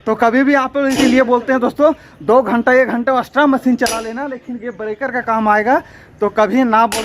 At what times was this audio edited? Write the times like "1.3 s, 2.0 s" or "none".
1.0 s